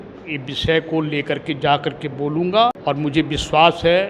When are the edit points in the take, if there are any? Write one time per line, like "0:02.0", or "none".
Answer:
0:02.8